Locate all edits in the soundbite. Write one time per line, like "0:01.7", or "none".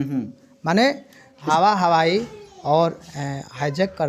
0:01.4